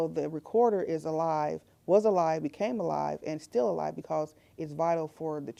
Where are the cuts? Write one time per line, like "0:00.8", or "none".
none